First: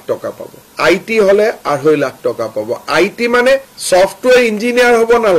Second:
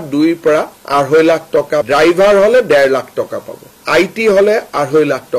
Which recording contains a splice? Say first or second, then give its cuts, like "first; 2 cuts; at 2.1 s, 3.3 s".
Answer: second; 1 cut; at 1.8 s